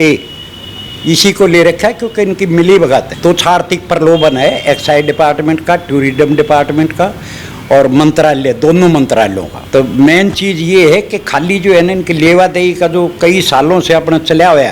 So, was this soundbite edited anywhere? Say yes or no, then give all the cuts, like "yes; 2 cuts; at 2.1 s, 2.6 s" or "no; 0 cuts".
yes; 2 cuts; at 3.1 s, 9.5 s